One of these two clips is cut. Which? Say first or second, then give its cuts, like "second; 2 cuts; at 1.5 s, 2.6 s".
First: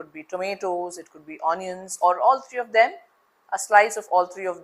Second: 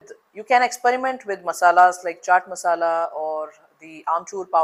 first; 1 cut; at 3.6 s